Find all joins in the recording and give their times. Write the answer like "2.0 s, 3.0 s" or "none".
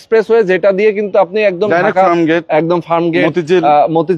none